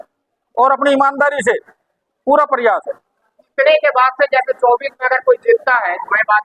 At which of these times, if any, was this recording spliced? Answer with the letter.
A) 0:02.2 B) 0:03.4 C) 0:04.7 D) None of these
B